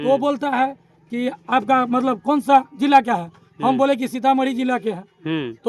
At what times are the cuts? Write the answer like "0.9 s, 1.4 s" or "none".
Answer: none